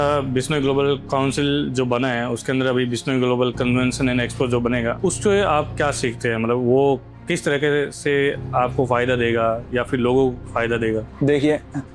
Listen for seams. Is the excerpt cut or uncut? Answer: cut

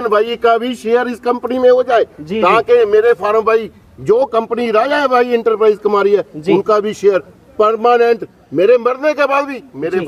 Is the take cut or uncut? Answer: uncut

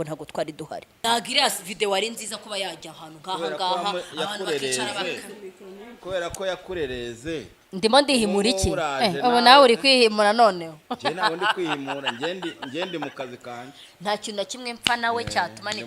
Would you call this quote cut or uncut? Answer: cut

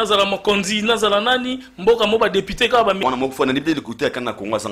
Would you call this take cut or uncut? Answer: cut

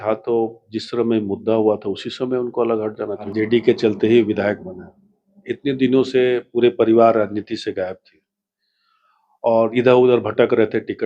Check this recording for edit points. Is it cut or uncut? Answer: cut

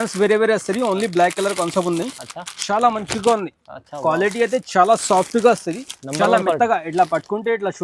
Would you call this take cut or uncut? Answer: uncut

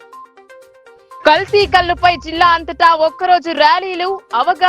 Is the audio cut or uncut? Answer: cut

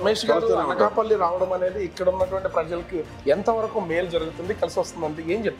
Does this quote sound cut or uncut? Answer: uncut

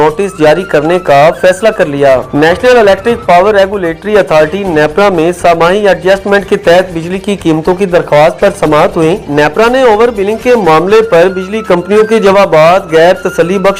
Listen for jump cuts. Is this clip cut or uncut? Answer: uncut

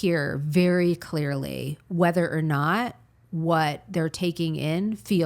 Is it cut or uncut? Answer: uncut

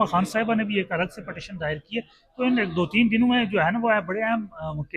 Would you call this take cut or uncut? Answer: uncut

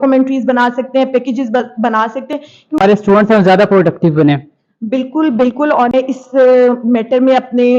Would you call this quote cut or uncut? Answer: cut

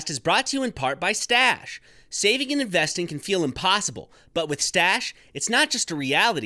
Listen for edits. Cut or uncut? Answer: uncut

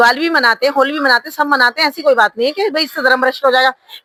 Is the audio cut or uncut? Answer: uncut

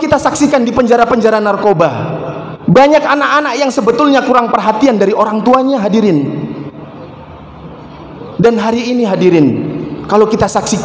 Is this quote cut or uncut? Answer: cut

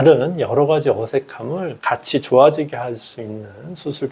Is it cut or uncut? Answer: uncut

